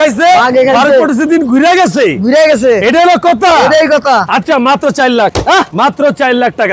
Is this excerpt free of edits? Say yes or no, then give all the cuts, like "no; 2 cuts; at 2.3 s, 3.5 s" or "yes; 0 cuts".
yes; 0 cuts